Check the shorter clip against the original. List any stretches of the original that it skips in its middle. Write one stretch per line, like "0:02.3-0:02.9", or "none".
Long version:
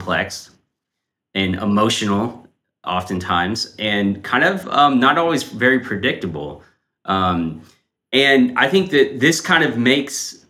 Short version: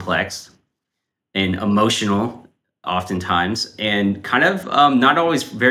none